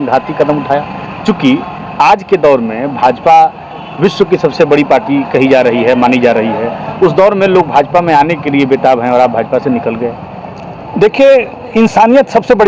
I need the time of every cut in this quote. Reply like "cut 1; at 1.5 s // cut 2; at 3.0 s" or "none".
none